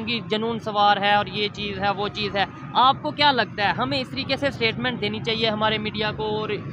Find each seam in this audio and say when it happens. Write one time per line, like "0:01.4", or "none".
none